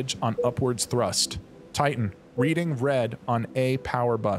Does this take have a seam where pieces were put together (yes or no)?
yes